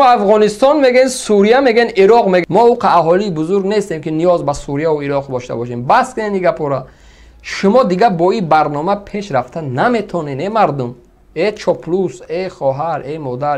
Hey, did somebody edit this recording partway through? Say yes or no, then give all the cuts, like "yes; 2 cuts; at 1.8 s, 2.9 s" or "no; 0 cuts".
yes; 1 cut; at 2.4 s